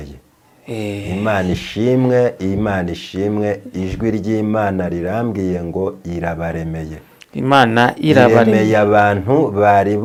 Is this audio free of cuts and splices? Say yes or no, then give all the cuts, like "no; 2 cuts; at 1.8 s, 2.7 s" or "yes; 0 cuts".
yes; 0 cuts